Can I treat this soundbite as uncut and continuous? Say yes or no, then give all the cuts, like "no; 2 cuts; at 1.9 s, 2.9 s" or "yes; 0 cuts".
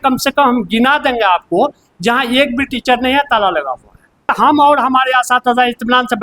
no; 1 cut; at 4.3 s